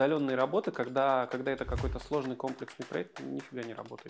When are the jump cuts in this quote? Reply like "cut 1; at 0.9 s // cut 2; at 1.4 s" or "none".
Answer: none